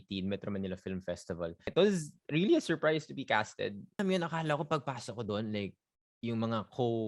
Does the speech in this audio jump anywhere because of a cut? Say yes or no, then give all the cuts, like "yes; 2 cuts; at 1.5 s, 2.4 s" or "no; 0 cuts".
yes; 2 cuts; at 1.7 s, 4.0 s